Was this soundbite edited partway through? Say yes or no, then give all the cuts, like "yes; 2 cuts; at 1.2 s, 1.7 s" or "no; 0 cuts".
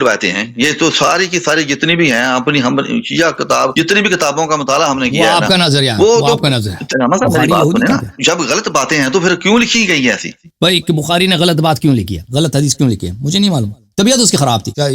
yes; 5 cuts; at 3.7 s, 6.9 s, 8.1 s, 10.5 s, 12.2 s